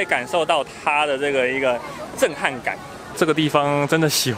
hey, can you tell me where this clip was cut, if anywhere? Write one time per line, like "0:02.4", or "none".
0:03.1